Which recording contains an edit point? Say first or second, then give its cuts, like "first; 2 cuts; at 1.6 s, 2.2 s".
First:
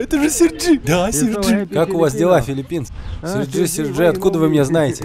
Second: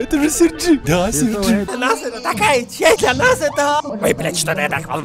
second; 3 cuts; at 1.7 s, 3.0 s, 3.9 s